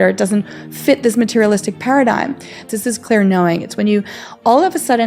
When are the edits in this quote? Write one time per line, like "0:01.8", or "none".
0:02.6